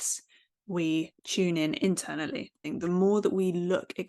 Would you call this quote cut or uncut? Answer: cut